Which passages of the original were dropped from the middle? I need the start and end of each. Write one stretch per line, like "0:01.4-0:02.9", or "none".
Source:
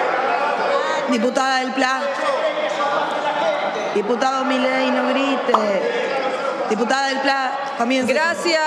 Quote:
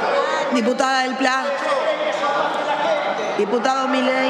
none